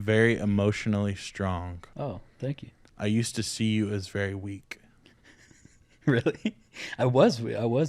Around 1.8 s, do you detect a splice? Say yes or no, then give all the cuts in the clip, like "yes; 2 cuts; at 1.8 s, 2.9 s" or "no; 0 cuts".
yes; 1 cut; at 1.8 s